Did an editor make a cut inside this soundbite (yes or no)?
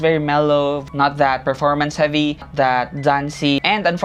no